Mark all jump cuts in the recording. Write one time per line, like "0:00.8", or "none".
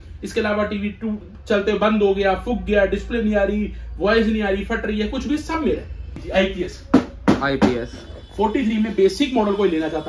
0:06.2